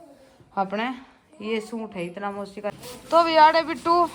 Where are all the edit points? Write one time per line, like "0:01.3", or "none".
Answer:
0:02.7